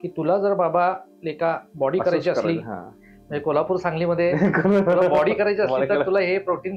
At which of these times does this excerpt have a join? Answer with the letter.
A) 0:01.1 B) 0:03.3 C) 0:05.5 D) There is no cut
D